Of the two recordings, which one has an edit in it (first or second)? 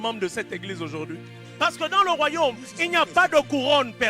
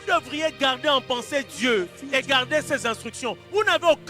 first